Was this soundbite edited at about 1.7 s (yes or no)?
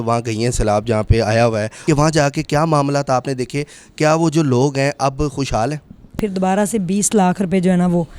yes